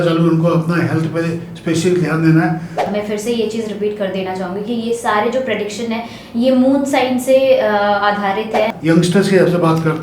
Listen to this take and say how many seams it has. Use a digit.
2